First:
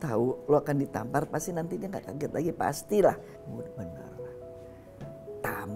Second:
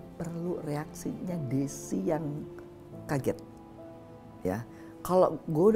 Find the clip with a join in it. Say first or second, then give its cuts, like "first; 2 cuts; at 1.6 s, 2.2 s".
first; 1 cut; at 3.3 s